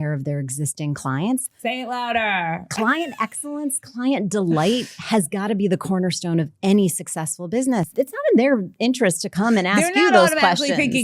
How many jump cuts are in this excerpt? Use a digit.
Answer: 2